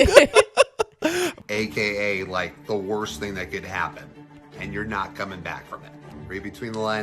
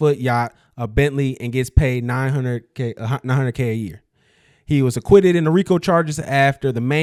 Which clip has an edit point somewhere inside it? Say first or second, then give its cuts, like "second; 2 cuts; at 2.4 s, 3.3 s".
first; 1 cut; at 1.3 s